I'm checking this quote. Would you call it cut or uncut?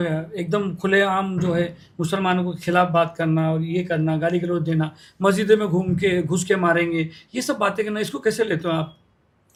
uncut